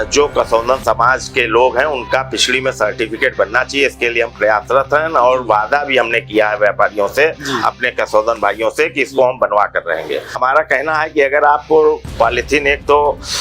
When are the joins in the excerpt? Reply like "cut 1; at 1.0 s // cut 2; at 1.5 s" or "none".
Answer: cut 1; at 10.4 s